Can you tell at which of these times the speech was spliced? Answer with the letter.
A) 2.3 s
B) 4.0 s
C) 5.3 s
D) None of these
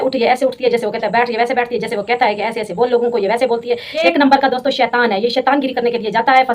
B